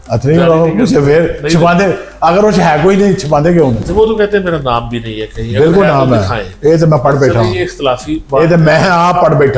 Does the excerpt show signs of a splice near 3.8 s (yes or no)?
yes